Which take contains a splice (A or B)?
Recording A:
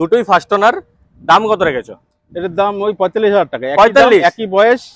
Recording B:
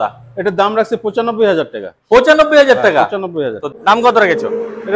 B